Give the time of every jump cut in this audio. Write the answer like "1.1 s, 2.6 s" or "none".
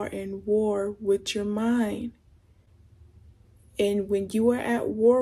none